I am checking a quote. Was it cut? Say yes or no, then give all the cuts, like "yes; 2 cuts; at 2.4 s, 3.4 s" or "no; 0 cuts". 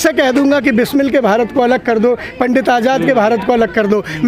no; 0 cuts